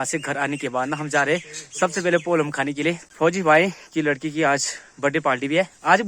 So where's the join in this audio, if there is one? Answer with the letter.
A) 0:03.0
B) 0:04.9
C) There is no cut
A